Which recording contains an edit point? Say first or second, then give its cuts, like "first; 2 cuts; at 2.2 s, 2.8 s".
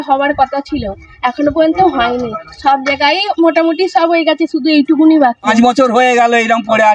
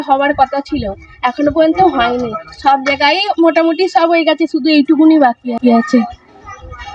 first; 1 cut; at 5.5 s